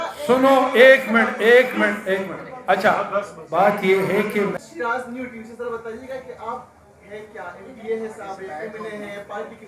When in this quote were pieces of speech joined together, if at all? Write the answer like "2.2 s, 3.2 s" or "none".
4.5 s